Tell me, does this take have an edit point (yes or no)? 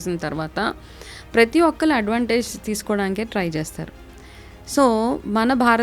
no